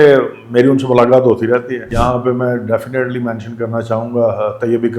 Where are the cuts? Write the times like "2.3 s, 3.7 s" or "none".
1.8 s